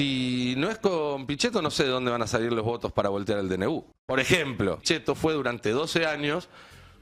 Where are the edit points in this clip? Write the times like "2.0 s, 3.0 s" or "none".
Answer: 3.9 s, 4.8 s

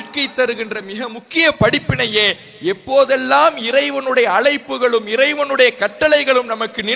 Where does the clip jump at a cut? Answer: none

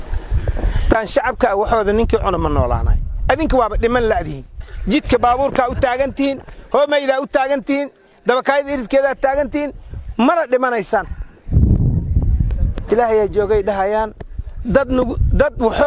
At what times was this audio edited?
0.9 s

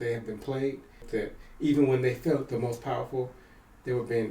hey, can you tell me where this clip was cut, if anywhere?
1.0 s

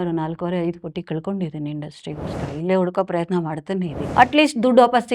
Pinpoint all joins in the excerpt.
4.0 s

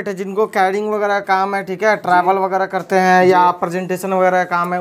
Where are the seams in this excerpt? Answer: none

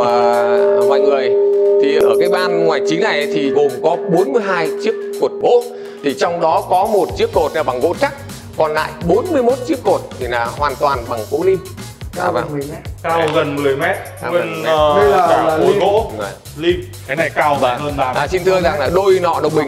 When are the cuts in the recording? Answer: 2.0 s, 3.5 s, 5.4 s, 16.9 s

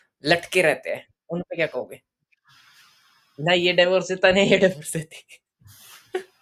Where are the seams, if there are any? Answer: none

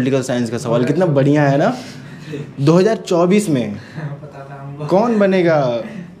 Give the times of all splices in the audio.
none

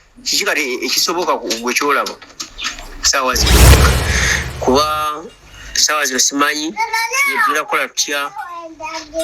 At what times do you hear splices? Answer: 3.9 s

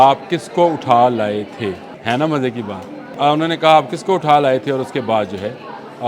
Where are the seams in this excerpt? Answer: 1.9 s, 3.1 s

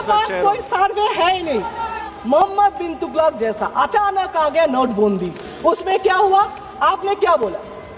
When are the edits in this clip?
2.0 s

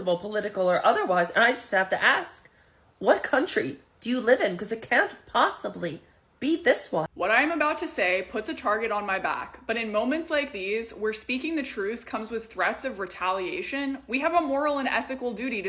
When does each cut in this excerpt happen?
7.1 s

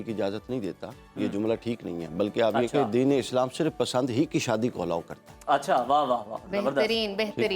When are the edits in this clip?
none

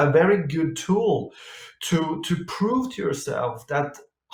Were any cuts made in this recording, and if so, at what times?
none

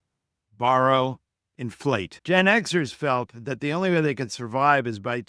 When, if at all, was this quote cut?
2.1 s

